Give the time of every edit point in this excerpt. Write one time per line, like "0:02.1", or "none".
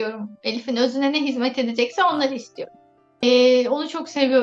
0:03.2